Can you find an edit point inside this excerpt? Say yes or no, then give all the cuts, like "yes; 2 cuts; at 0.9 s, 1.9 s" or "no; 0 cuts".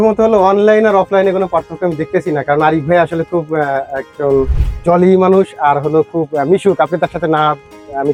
no; 0 cuts